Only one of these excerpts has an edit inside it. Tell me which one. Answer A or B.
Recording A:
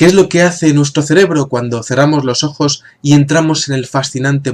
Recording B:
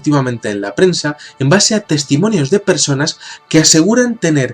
B